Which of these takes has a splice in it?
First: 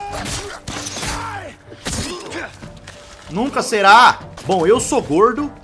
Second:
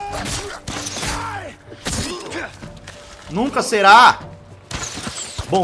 first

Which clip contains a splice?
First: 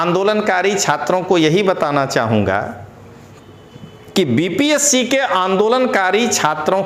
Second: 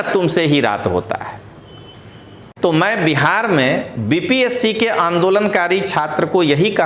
second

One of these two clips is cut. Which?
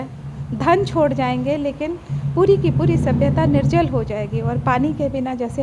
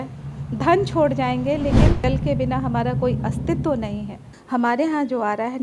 second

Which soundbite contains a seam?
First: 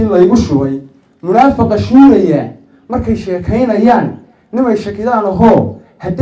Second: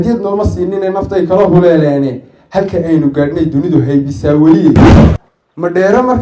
second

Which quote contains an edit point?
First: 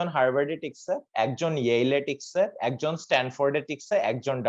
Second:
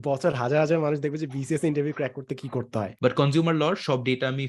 second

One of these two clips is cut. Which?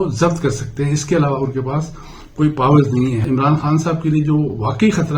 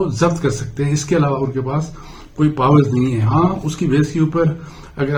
first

